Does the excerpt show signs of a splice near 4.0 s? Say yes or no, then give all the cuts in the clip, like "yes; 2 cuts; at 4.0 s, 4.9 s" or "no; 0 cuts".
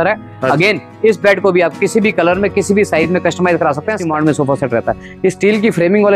yes; 1 cut; at 4.0 s